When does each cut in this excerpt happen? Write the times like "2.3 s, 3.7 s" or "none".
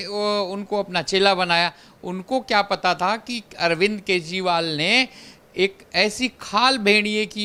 none

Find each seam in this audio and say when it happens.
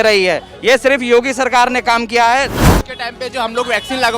2.6 s

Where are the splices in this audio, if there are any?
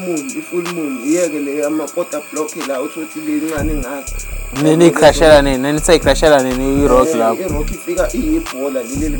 none

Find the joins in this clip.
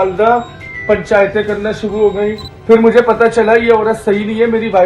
none

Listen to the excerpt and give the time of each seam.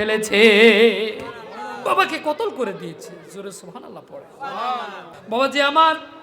5.1 s

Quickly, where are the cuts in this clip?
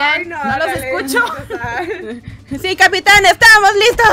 none

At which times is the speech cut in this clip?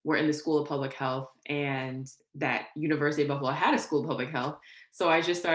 none

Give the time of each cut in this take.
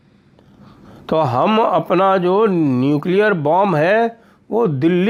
none

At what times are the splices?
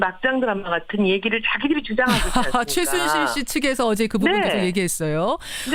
none

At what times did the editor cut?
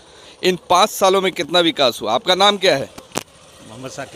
none

